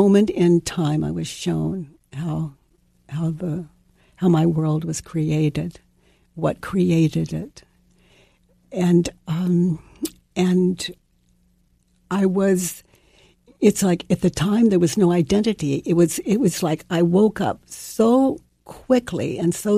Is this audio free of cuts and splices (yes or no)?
yes